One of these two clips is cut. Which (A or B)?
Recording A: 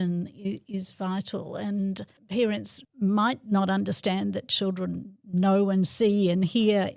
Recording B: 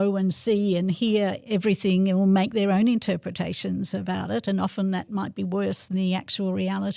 A